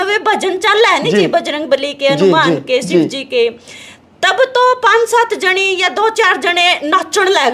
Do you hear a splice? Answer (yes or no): no